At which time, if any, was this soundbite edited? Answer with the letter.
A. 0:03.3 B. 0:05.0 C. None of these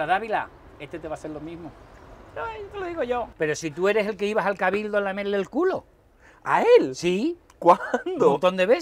A